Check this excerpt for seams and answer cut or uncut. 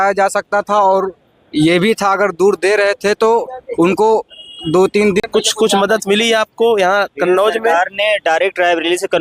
cut